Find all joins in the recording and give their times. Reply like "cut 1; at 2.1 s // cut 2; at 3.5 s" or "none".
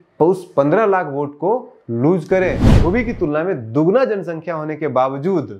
cut 1; at 2.7 s